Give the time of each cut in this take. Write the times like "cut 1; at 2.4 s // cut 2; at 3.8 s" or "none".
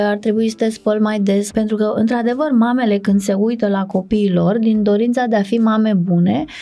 cut 1; at 1.4 s